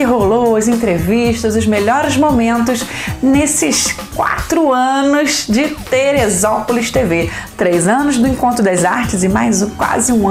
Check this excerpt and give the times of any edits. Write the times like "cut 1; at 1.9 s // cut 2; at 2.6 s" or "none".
none